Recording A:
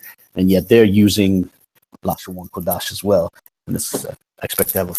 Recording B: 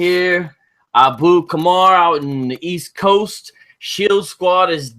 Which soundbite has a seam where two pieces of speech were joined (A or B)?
B